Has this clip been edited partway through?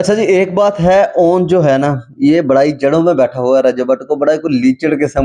no; 0 cuts

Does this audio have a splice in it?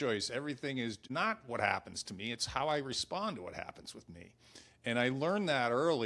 yes; 1 cut; at 1.0 s

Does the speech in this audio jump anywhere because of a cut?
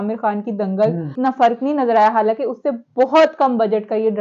yes; 1 cut; at 1.1 s

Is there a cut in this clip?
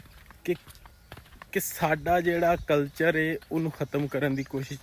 no; 0 cuts

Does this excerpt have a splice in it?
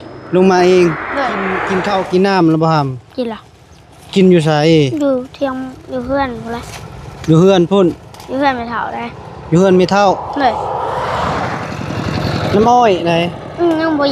yes; 2 cuts; at 1.6 s, 11.5 s

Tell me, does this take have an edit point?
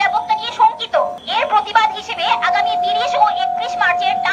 yes; 1 cut; at 1.2 s

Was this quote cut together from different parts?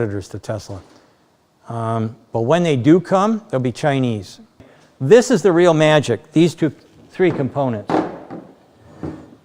yes; 1 cut; at 4.7 s

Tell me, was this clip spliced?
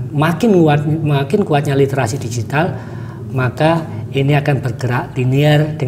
no; 0 cuts

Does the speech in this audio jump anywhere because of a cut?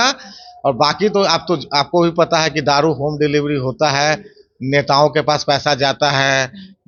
no; 0 cuts

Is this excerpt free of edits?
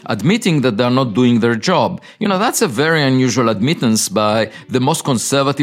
yes; 0 cuts

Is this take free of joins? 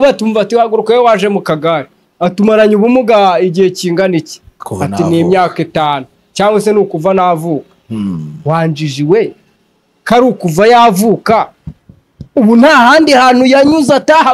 yes; 0 cuts

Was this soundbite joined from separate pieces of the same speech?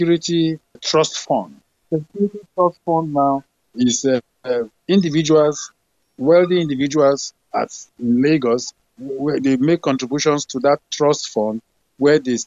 no; 0 cuts

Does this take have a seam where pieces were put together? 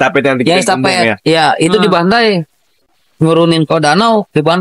no; 0 cuts

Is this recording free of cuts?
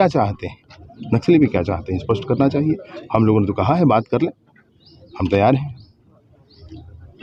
yes; 0 cuts

